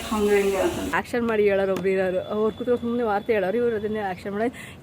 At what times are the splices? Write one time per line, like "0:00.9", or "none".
0:00.9